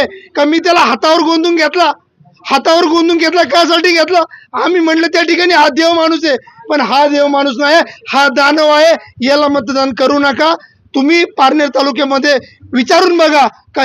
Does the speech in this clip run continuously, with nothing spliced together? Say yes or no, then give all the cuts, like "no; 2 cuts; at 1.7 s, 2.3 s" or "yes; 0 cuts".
yes; 0 cuts